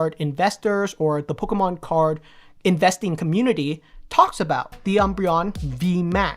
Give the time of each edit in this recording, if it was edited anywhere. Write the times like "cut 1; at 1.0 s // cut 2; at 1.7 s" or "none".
cut 1; at 4.7 s